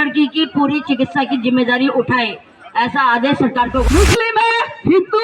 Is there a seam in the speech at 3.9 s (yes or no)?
yes